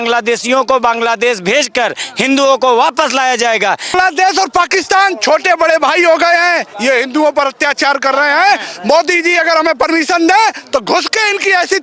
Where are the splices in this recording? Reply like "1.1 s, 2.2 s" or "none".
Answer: 3.9 s